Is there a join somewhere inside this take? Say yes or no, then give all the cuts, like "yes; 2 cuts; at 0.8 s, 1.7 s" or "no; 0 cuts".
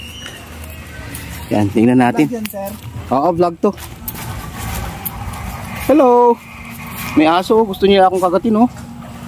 no; 0 cuts